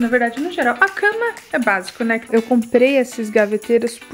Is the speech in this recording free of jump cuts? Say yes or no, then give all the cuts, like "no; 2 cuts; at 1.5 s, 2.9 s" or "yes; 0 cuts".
no; 1 cut; at 2.3 s